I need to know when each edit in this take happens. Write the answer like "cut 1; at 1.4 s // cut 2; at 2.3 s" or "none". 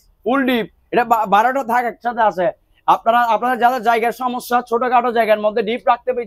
none